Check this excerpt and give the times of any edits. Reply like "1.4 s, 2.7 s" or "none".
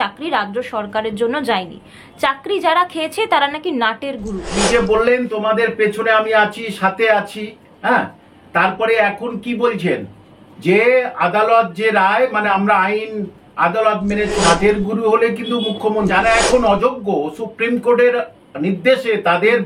4.6 s, 14.4 s, 16.1 s